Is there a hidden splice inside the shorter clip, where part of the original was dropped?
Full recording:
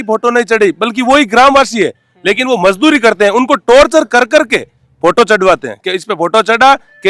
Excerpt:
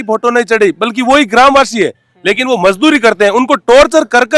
no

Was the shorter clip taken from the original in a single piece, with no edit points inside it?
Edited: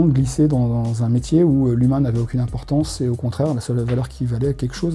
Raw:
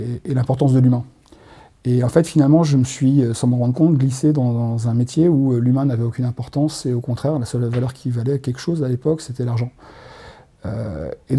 yes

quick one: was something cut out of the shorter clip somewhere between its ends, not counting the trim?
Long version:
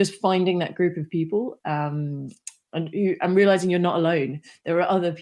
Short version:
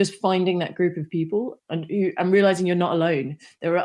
yes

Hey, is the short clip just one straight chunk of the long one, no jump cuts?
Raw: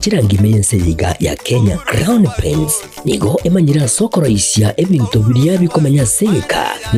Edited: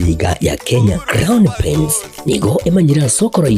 yes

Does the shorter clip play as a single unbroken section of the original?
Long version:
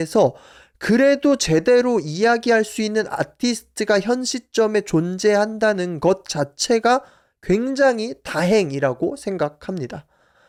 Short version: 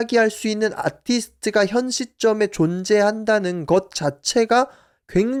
yes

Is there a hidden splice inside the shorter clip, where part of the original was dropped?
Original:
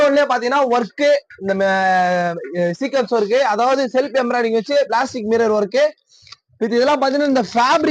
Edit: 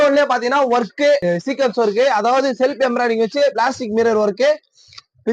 yes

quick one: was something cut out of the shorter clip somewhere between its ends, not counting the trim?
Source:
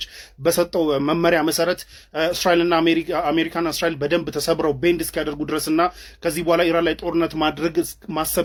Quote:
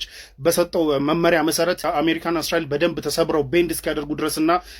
yes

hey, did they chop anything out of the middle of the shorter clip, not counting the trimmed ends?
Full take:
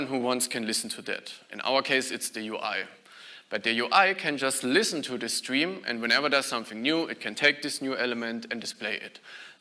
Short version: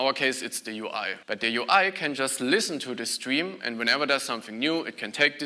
yes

